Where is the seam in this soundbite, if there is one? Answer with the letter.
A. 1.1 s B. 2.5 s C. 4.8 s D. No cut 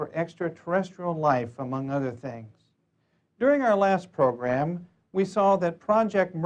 C